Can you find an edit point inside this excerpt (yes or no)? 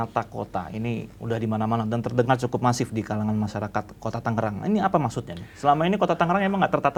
no